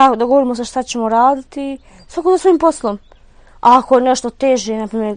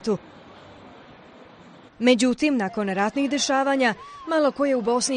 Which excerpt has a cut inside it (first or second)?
first